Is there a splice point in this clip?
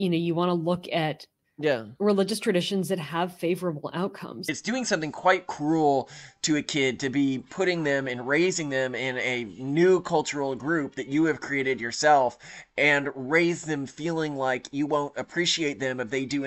yes; 1 cut; at 4.5 s

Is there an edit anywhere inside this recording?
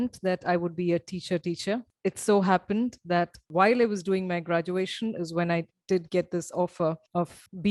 no; 0 cuts

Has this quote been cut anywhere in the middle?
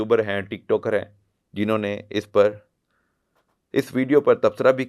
no; 0 cuts

